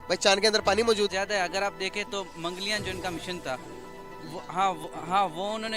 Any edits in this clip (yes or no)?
yes